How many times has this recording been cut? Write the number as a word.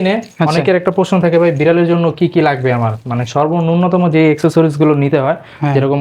zero